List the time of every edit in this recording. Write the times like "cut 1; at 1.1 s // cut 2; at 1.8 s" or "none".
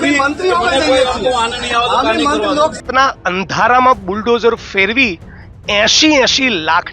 cut 1; at 2.8 s